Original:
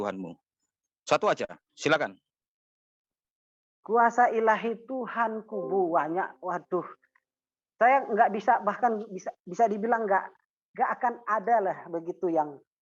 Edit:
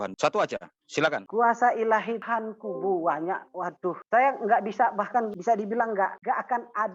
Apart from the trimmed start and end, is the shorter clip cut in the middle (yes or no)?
yes